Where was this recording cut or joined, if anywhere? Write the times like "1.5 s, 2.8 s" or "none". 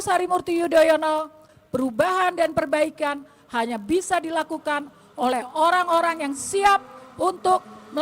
1.5 s